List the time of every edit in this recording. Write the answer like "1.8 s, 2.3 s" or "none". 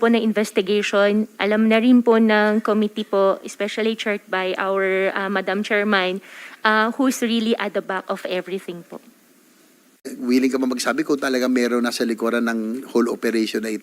10.2 s